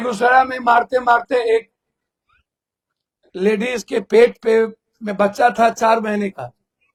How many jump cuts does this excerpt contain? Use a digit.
0